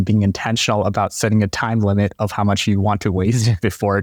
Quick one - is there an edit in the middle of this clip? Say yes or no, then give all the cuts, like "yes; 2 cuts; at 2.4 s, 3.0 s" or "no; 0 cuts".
no; 0 cuts